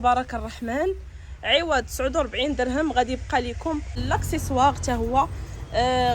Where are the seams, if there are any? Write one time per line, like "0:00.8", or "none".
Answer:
0:03.9

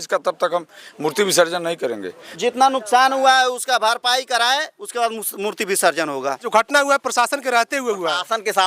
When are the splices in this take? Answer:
0:02.2
0:06.5

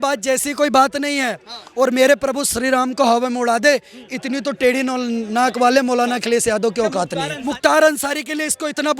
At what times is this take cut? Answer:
0:07.6

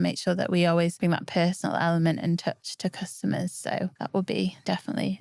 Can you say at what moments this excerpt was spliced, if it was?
0:01.0
0:04.0

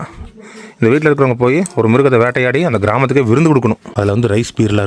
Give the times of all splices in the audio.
0:03.9

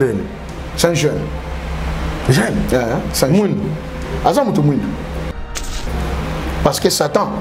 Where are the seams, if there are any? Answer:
0:05.4

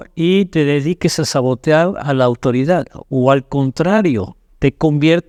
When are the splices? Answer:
none

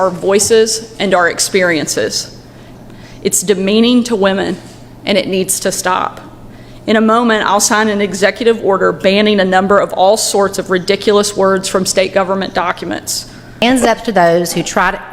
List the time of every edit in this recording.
0:02.7
0:13.6

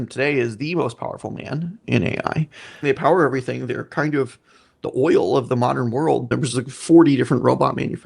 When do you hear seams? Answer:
0:01.8
0:02.8
0:06.3

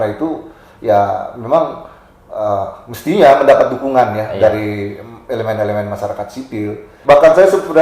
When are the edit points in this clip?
0:06.9

